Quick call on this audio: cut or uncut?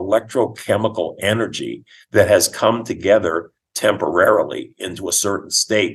uncut